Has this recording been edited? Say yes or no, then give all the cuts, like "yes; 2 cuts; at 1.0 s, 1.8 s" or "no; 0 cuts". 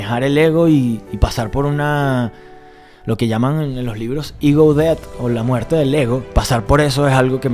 yes; 1 cut; at 6.3 s